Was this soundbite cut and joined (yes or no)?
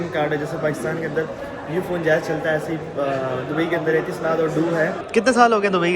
yes